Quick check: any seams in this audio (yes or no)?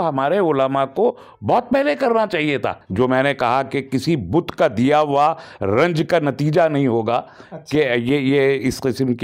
yes